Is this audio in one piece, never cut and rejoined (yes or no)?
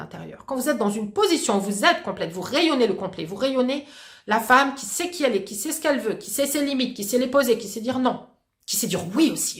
yes